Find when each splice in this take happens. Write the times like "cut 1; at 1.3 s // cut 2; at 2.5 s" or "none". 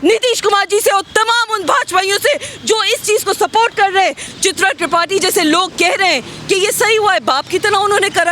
cut 1; at 4.3 s